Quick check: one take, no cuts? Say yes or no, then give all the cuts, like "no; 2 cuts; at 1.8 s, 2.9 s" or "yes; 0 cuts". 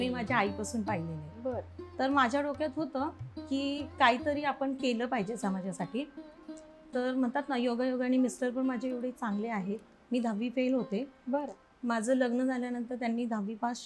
yes; 0 cuts